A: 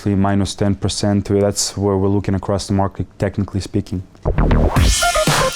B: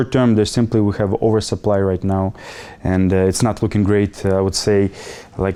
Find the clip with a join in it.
A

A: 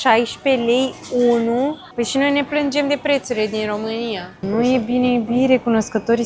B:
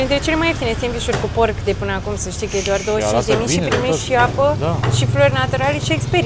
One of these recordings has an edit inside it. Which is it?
A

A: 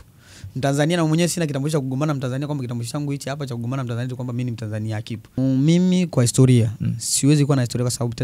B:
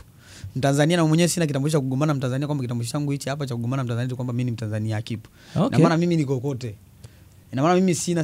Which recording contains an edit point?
A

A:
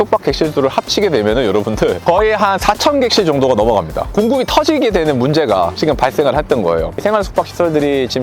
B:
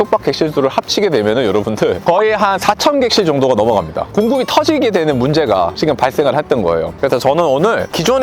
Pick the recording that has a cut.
A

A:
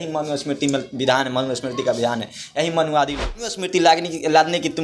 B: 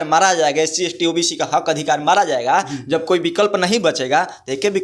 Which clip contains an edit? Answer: A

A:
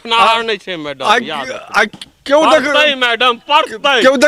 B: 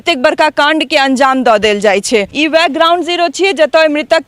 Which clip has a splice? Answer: B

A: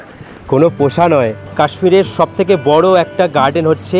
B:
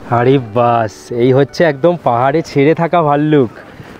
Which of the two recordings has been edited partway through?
A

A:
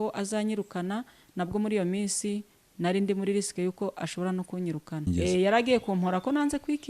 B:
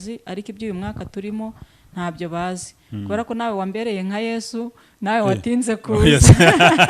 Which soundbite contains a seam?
A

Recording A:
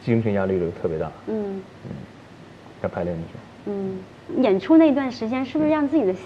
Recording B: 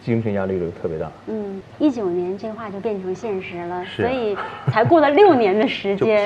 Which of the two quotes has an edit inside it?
B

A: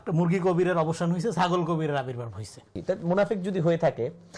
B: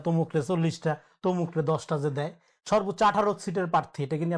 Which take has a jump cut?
A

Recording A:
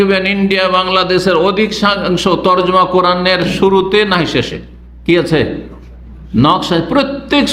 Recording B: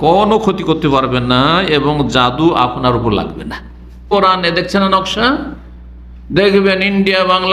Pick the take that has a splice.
B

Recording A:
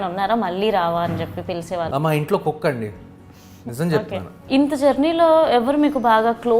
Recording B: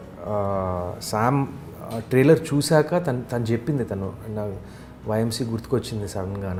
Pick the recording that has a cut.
A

